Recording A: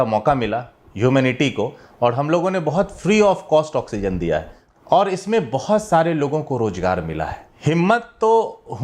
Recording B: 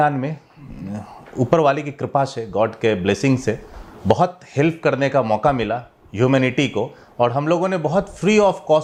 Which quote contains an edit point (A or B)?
A